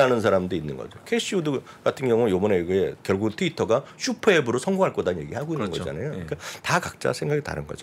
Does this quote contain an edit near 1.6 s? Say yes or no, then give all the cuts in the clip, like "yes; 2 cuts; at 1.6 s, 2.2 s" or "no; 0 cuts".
no; 1 cut; at 3.0 s